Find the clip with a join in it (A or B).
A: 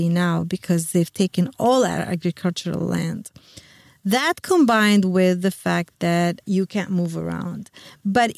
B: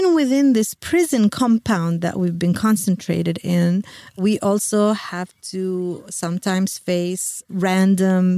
A